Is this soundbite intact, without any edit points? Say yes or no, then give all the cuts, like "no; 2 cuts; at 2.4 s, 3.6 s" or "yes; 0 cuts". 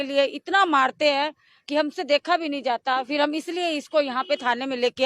yes; 0 cuts